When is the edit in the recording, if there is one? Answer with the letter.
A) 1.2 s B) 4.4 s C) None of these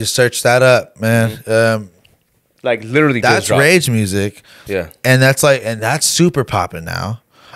C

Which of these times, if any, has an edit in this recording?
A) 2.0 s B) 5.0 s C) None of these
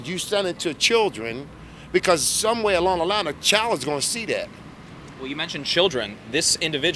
C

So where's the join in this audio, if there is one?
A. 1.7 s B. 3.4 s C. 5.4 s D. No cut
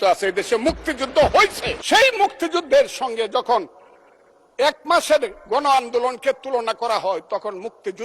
A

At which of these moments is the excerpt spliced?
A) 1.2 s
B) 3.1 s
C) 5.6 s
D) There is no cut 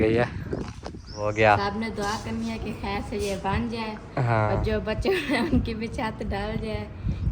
A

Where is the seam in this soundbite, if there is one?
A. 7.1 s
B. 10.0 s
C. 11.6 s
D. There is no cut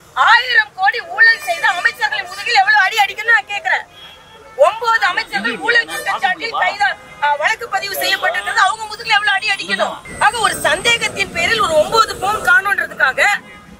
B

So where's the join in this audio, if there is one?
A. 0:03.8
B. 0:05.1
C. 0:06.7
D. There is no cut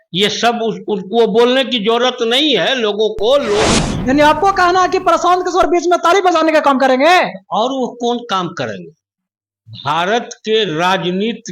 A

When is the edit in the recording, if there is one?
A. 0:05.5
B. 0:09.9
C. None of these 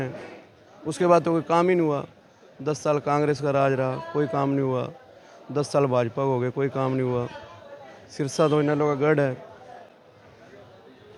C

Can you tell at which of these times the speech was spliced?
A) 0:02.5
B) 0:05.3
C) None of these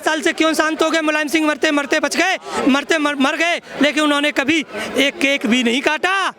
C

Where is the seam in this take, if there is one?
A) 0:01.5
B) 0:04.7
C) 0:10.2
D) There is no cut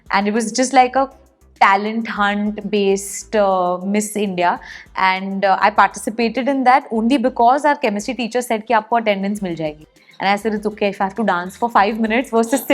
D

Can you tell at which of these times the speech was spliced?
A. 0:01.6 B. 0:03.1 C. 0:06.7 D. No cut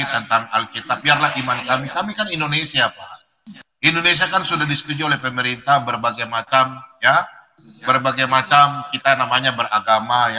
D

